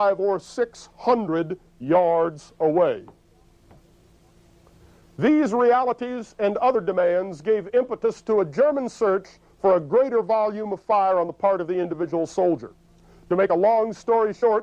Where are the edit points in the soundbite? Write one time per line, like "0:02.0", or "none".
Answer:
0:12.6